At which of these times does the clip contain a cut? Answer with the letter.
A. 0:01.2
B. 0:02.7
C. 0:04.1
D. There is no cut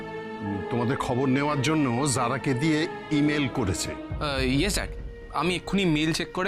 C